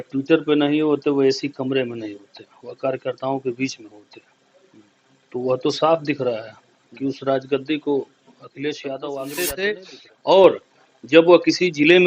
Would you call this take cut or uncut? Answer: cut